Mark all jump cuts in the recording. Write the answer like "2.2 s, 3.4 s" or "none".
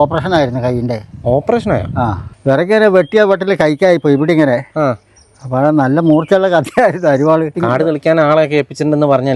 2.2 s, 7.6 s